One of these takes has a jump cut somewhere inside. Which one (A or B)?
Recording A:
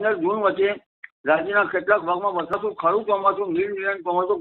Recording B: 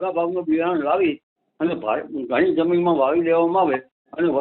A